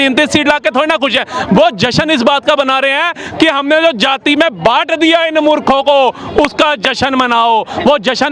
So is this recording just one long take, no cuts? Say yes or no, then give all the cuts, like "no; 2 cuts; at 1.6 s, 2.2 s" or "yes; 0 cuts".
yes; 0 cuts